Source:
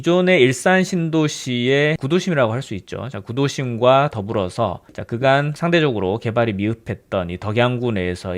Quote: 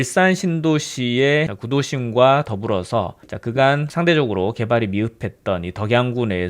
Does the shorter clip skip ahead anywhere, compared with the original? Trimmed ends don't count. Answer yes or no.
yes